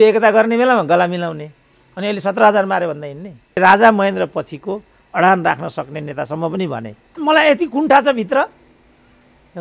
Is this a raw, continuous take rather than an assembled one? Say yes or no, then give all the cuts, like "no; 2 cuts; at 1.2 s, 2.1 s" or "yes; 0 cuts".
no; 2 cuts; at 3.6 s, 7.0 s